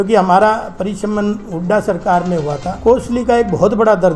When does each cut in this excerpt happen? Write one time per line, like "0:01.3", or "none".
0:02.7